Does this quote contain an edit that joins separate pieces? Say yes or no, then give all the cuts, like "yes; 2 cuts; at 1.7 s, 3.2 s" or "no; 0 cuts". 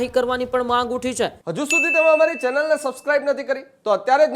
yes; 1 cut; at 1.4 s